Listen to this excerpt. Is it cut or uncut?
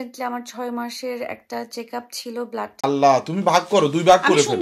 cut